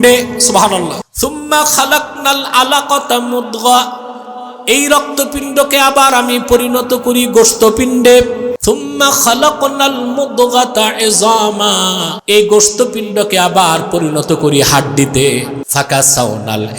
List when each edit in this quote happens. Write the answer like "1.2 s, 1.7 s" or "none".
1.1 s, 8.6 s, 12.1 s, 15.6 s

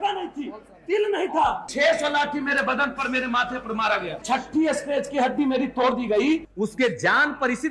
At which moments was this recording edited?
1.7 s, 4.2 s, 6.5 s

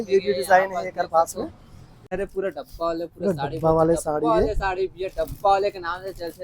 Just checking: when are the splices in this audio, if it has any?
2.1 s

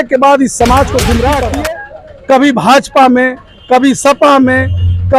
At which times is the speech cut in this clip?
1.5 s

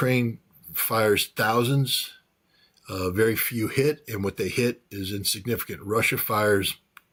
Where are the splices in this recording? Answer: none

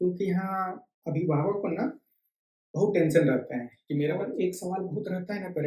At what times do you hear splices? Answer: 4.0 s

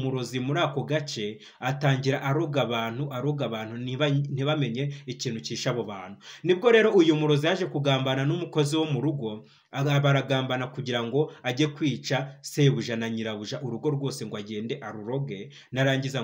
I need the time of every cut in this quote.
none

